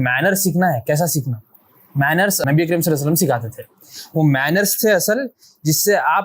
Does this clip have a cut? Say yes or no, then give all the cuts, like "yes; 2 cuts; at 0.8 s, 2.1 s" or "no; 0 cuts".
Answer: yes; 1 cut; at 2.4 s